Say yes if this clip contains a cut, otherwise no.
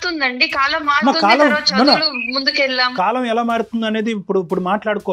yes